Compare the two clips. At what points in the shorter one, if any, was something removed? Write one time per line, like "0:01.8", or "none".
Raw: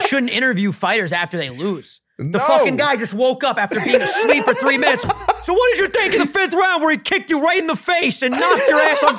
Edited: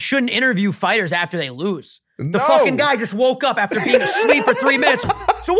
none

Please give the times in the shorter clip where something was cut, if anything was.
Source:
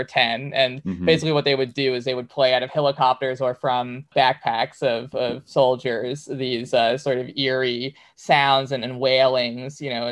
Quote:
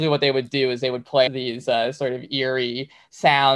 0:01.3

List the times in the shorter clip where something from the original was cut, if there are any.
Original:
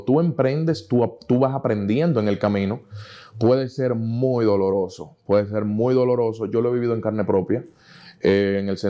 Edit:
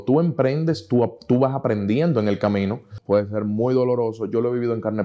0:02.9

